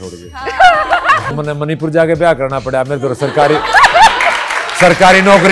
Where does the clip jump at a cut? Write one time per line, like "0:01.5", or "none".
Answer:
0:01.3